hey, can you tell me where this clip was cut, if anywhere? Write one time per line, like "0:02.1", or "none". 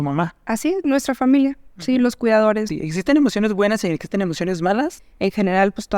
0:02.7
0:05.0